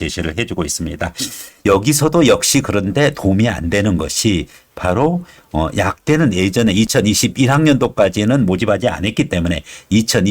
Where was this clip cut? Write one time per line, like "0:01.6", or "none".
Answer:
0:01.4